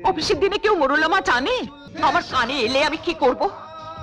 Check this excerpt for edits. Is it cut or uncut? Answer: cut